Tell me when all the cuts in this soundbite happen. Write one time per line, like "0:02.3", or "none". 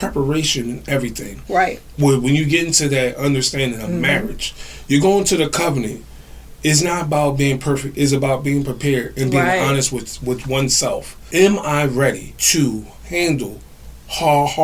0:01.8
0:11.2
0:12.3